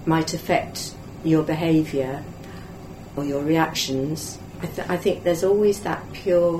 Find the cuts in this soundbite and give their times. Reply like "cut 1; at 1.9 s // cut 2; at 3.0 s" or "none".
none